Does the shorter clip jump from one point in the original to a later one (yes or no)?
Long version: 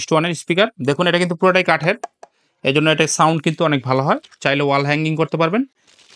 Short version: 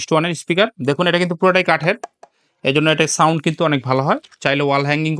no